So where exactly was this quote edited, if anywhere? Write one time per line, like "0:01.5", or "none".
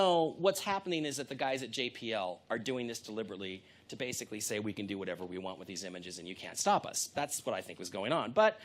0:02.4